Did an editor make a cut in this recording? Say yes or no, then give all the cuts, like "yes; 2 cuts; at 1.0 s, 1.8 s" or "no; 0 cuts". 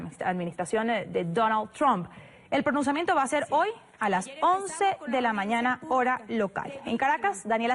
yes; 1 cut; at 2.1 s